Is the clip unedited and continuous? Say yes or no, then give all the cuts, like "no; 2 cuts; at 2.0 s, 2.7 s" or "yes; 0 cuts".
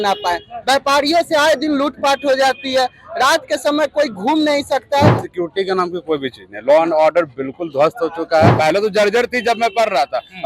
no; 2 cuts; at 5.2 s, 8.5 s